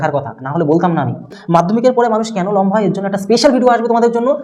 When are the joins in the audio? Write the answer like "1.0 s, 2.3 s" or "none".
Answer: 1.4 s